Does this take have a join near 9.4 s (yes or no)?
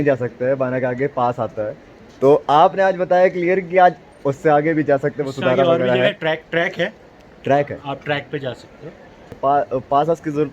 yes